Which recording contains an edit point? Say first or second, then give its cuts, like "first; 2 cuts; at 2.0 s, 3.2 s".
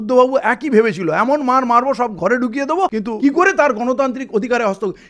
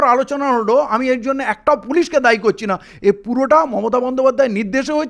first; 1 cut; at 3.0 s